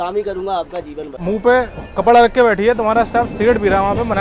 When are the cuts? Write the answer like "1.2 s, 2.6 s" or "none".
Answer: 1.2 s